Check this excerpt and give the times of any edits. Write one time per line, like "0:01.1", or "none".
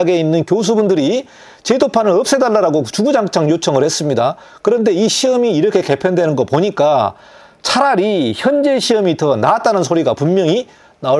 none